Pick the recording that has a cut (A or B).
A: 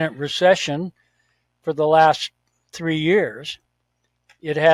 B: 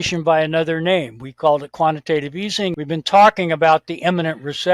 B